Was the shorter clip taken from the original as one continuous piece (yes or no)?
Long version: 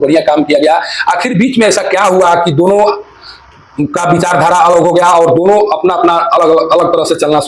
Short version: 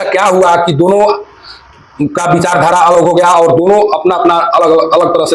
yes